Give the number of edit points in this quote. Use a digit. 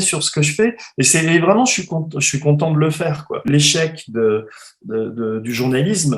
1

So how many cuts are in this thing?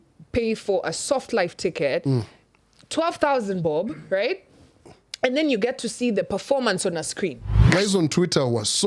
1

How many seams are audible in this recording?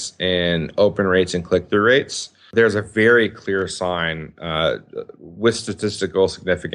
1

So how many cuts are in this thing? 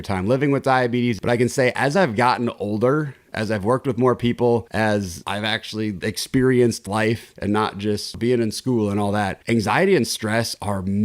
2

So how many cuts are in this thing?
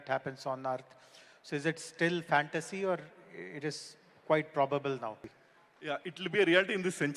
1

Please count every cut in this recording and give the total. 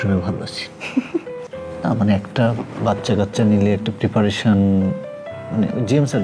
1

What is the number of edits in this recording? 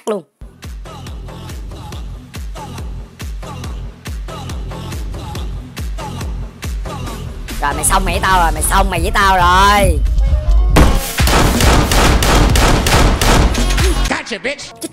1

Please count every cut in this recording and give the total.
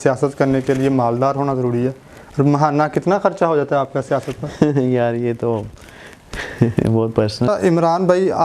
1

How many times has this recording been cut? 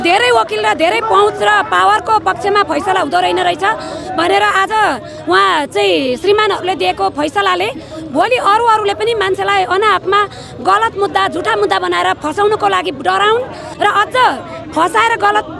1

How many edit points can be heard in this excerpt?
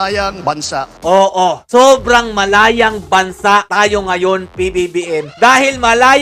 1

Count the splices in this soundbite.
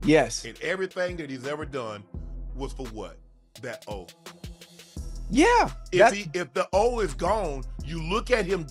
0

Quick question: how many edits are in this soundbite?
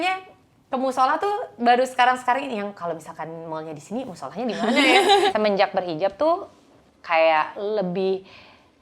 1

